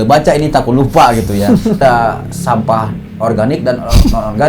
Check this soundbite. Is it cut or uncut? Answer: cut